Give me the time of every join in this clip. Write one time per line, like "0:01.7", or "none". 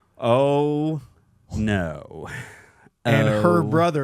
none

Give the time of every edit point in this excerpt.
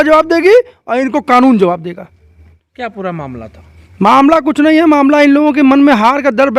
0:02.6

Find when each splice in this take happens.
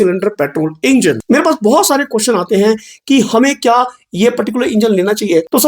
0:01.2

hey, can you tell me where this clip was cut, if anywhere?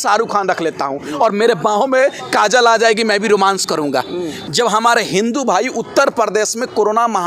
0:04.4

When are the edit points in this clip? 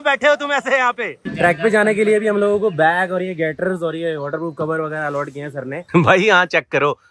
0:01.1
0:05.8

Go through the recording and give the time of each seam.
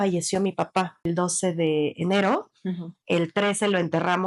0:01.1

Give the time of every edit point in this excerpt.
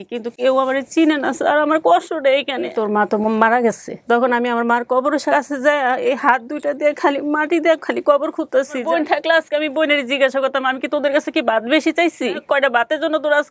0:02.7
0:05.3
0:08.8
0:12.4

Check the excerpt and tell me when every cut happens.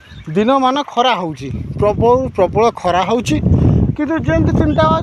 none

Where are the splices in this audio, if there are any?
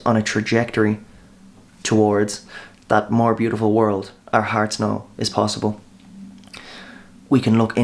none

